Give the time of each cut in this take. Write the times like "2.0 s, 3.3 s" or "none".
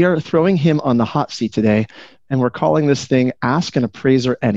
none